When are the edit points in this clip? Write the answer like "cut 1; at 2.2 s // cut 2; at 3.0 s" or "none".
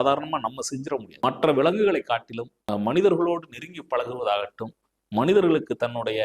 cut 1; at 1.1 s // cut 2; at 2.6 s